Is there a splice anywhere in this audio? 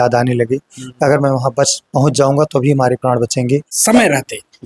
yes; 1 cut; at 3.7 s

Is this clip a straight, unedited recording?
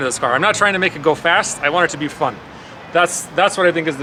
yes; 0 cuts

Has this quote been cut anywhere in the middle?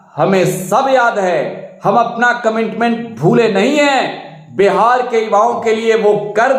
no; 0 cuts

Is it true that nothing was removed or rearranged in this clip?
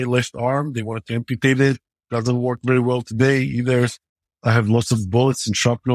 no; 1 cut; at 1.9 s

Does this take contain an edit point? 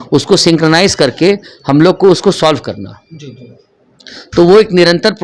no; 0 cuts

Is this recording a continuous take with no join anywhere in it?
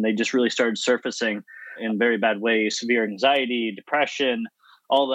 no; 1 cut; at 1.8 s

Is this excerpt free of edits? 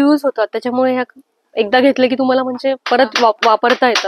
yes; 0 cuts

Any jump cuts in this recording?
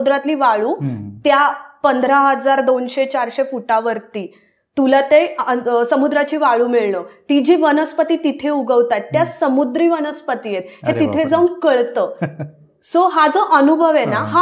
no; 0 cuts

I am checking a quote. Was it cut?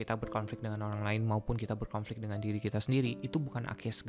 no; 0 cuts

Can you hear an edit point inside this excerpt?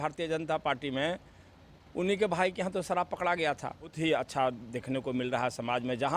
yes; 1 cut; at 3.9 s

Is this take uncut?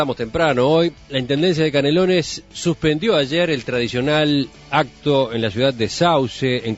yes; 0 cuts

